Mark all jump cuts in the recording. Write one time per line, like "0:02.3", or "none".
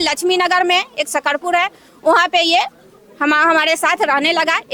none